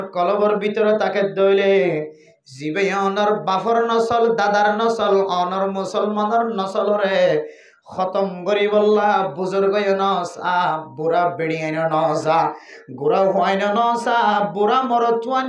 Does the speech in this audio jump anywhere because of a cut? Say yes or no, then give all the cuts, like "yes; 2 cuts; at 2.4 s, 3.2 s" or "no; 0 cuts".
no; 0 cuts